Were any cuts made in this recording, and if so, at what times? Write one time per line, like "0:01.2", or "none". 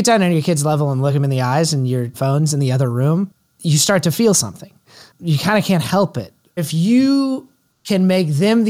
0:01.1
0:02.1
0:03.5
0:06.5